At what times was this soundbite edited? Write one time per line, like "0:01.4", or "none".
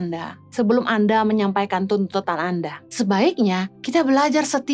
0:02.8
0:03.7

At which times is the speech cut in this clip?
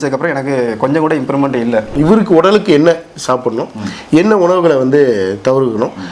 0:01.9

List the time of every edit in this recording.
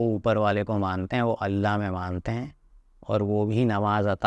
none

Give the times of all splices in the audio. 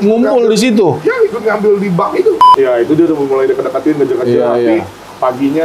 0:02.5

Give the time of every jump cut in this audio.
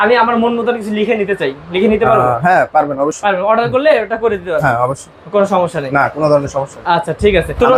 none

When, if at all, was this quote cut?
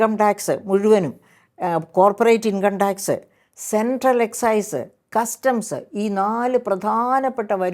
none

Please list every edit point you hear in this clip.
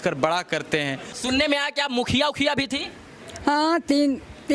0:01.1

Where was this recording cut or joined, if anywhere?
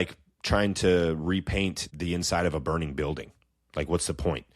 0:01.9

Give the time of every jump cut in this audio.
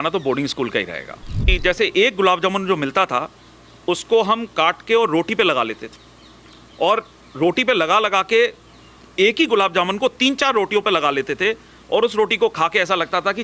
0:01.5

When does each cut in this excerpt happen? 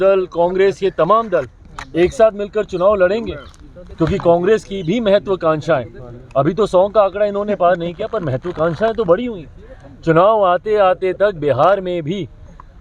none

